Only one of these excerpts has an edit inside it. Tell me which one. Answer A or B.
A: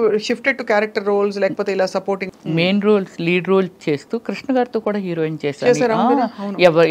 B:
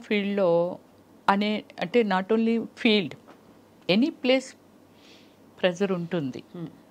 A